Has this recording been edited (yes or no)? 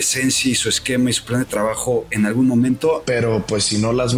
yes